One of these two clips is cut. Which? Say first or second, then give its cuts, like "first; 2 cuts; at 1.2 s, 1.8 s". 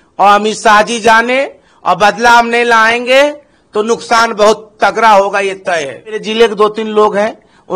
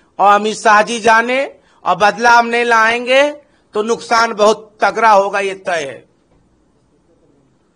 first; 1 cut; at 6.2 s